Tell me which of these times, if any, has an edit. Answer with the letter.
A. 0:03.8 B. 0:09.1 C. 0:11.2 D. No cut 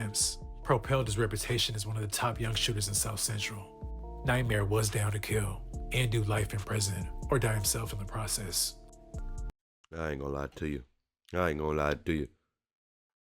B